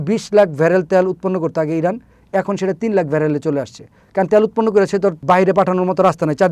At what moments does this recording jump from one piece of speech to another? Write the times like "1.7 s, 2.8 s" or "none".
5.2 s